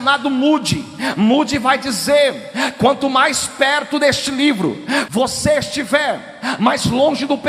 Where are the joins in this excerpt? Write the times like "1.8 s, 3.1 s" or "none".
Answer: 5.1 s